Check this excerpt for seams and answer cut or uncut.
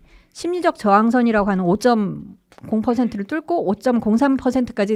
uncut